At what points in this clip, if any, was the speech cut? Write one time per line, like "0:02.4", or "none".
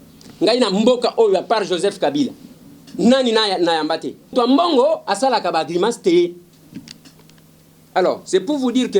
0:04.3